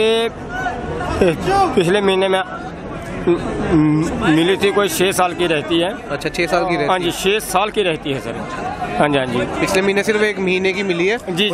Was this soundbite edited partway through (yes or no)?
no